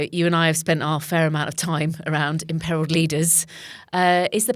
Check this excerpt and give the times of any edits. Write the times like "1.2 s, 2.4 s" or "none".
none